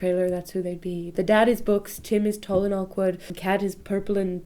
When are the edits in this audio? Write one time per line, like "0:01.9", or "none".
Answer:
0:01.1
0:03.4